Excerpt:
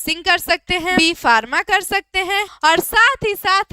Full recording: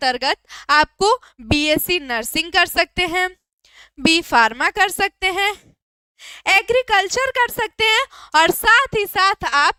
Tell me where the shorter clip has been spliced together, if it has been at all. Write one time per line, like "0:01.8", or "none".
0:00.9
0:02.5

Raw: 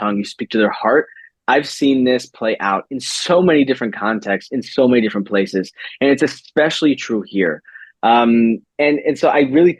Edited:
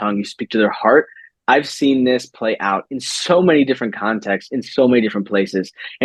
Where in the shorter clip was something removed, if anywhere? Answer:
none

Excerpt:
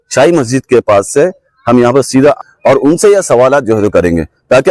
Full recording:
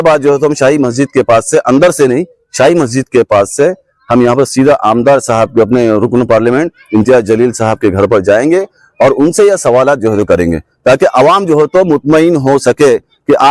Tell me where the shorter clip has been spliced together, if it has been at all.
0:02.4

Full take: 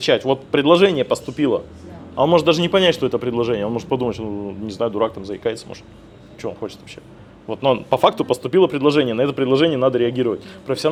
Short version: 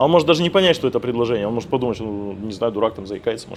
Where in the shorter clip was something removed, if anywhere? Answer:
none

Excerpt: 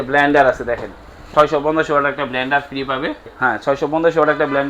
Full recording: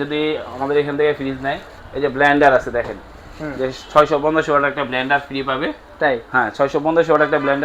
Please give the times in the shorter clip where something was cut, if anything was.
0:01.2
0:03.3

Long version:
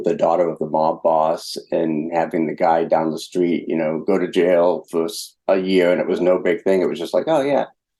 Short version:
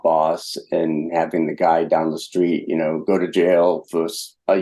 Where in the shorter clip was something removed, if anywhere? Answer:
none

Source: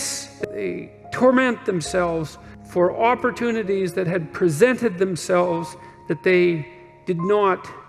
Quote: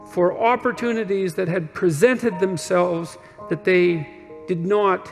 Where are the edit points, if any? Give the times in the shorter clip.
none

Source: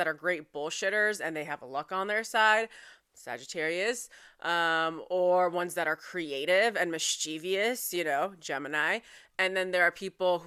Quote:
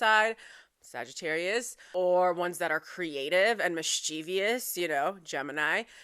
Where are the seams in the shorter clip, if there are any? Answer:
0:01.8

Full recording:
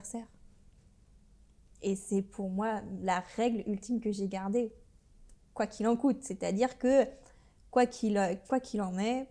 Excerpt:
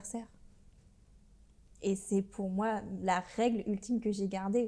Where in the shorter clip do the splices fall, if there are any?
none

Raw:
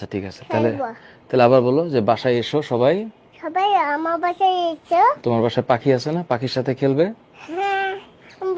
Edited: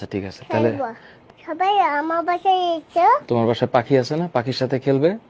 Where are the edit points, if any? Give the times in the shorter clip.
0:01.2

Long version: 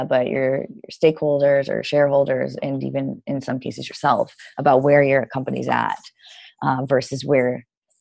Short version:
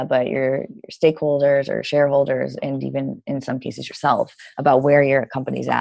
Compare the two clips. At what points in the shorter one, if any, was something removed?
none

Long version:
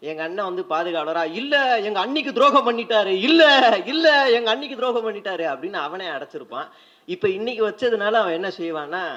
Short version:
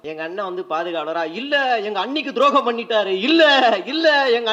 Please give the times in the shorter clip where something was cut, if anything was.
none

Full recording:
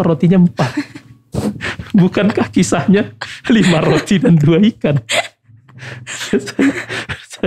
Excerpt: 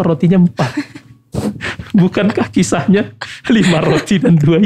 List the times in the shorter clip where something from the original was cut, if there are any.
none

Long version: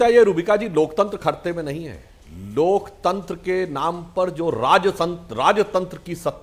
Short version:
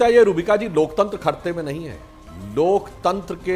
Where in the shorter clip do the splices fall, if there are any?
none

